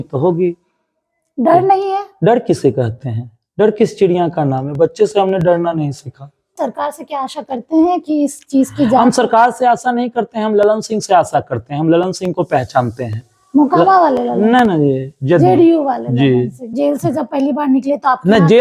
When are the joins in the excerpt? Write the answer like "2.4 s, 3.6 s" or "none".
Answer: 6.6 s, 16.7 s